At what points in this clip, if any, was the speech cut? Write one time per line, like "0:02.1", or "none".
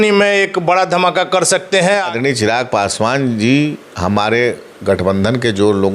0:02.1